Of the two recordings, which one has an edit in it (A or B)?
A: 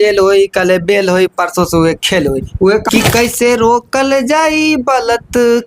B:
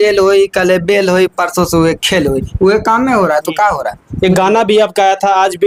A